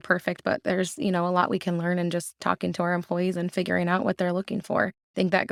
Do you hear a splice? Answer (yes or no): no